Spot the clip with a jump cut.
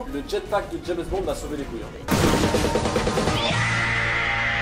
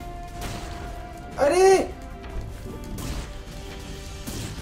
first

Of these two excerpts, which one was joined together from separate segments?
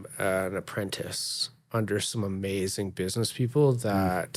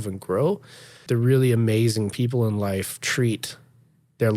second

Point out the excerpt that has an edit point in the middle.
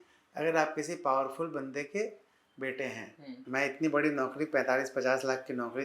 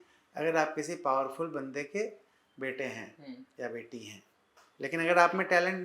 first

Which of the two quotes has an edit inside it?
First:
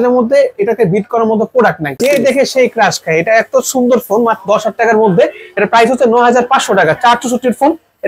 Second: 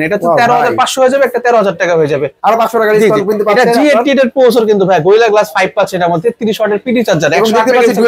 first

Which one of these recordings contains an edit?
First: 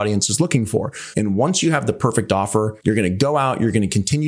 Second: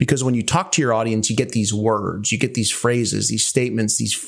first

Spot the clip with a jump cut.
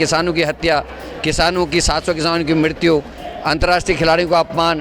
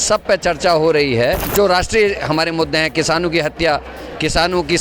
second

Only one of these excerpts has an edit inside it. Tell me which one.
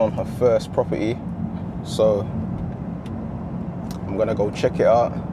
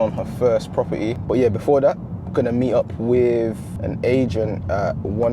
second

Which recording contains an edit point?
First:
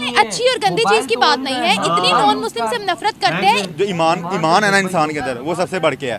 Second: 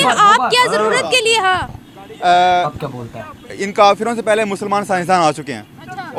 first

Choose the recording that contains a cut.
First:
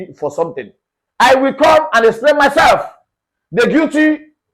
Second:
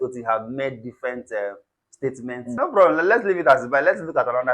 second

